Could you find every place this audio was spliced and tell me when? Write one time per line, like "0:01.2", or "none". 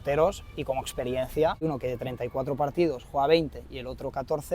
0:01.6